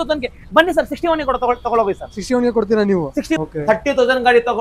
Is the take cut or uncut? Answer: cut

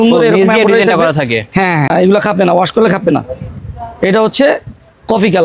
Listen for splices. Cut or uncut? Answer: cut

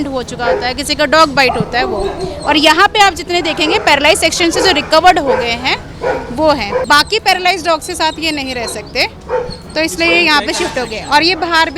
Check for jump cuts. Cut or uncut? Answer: cut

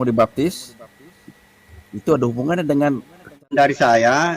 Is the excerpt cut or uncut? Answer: cut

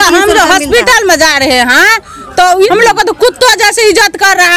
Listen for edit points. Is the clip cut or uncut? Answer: cut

